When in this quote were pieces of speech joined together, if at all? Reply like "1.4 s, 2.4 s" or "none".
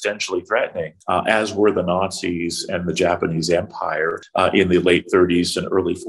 0.9 s, 4.2 s